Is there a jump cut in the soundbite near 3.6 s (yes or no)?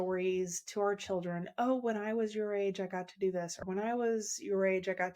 yes